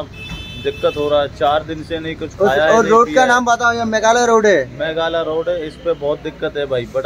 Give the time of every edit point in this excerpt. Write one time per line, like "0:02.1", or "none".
none

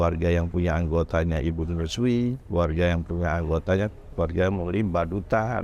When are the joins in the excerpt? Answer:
none

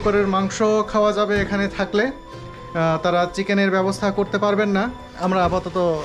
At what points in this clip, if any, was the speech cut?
0:05.1

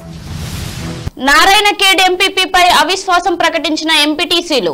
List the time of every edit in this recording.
0:01.1

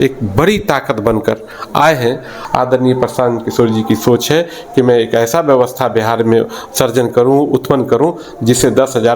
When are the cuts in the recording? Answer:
0:02.4

